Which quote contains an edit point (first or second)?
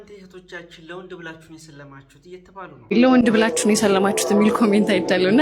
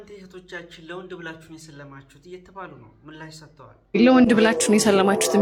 first